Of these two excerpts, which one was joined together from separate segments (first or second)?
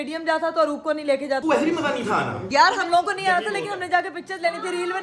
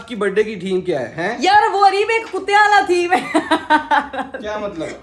first